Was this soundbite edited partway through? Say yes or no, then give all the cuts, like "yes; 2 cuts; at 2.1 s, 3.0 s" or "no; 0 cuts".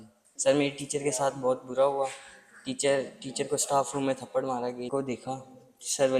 yes; 1 cut; at 4.9 s